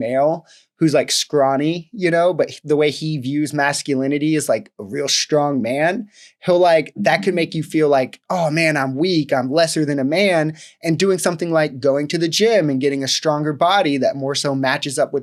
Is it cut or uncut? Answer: uncut